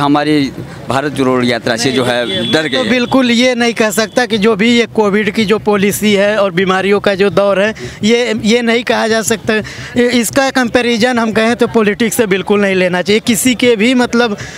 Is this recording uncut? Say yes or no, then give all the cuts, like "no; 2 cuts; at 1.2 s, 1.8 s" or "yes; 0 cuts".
yes; 0 cuts